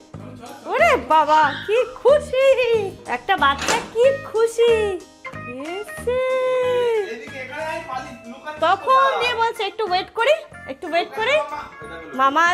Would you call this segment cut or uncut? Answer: uncut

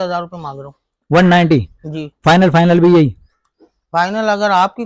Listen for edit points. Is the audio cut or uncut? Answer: uncut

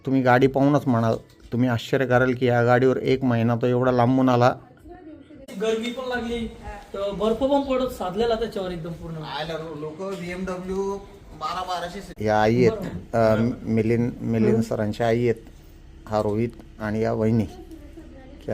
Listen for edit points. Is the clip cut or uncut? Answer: cut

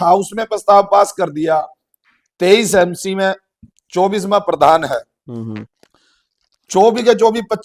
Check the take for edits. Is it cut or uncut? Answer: uncut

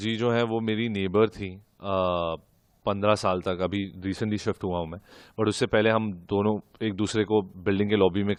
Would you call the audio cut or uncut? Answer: uncut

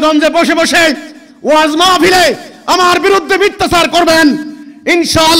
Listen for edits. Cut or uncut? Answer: uncut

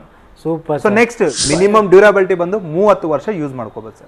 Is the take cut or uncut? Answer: cut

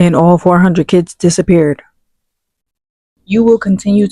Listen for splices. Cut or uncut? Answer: cut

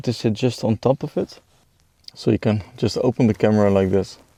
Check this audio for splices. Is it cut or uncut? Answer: uncut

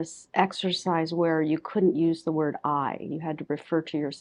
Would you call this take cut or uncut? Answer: uncut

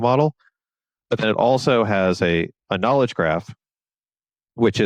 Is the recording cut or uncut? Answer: uncut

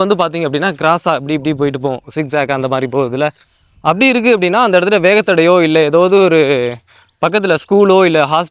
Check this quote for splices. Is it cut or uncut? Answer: uncut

